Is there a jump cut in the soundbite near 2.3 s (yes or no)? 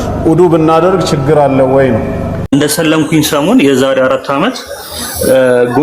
yes